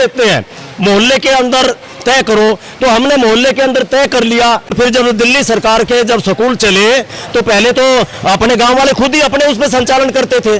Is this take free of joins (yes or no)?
no